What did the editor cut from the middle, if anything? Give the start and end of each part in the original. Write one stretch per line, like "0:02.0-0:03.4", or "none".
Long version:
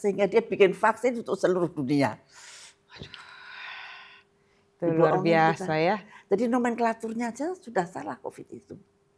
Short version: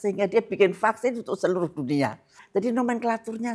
0:02.4-0:06.1